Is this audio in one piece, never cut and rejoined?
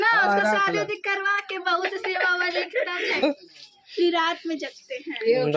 no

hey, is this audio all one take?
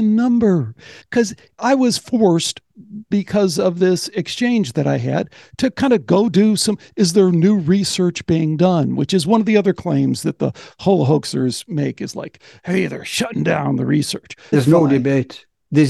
no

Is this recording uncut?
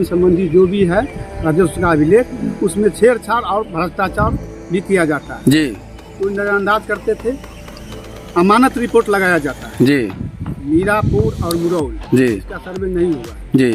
yes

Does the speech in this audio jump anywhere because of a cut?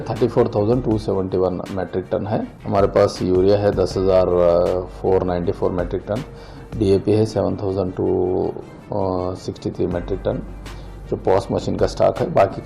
yes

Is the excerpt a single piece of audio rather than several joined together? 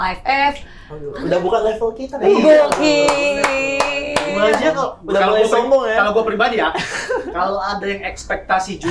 yes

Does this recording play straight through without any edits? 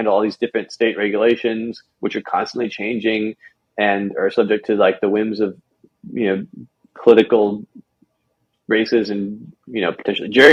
yes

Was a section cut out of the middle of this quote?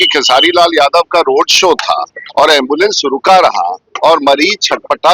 yes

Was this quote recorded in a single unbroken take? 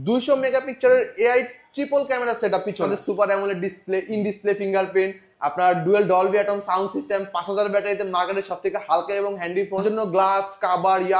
no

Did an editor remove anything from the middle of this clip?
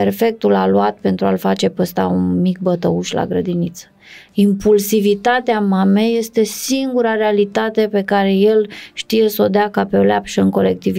no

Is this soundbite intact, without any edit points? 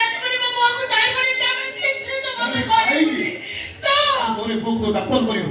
no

